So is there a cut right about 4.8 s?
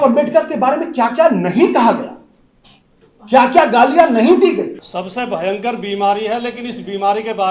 yes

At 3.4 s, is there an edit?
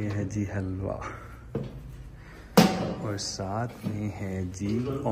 no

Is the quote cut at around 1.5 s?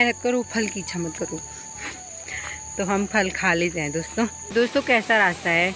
no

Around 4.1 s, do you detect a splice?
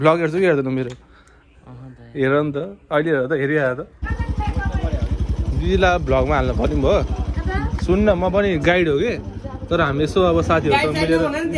yes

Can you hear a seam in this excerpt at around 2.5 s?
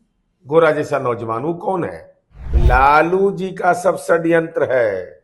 yes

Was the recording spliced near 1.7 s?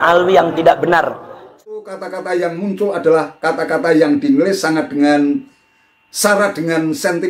yes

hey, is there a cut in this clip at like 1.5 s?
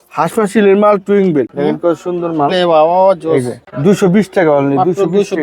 yes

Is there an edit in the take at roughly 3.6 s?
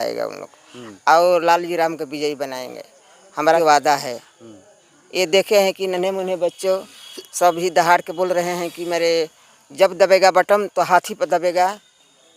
yes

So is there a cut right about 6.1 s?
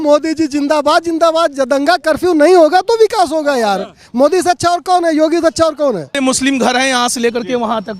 yes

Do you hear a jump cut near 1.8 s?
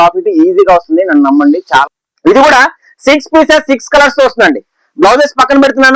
yes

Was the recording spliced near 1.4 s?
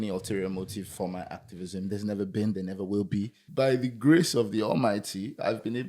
no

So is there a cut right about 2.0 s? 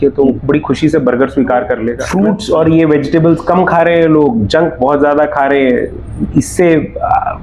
yes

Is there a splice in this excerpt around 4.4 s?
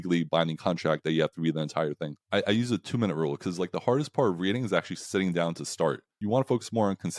no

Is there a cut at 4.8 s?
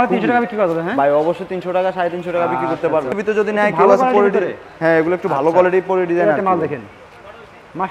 no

